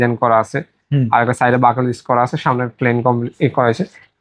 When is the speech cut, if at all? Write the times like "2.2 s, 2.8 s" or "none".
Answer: none